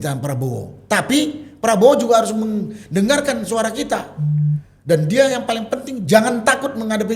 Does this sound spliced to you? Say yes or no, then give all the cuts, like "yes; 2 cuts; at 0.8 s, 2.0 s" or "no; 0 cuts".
no; 0 cuts